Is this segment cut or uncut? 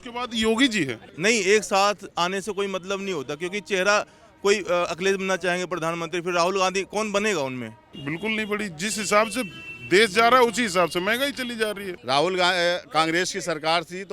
cut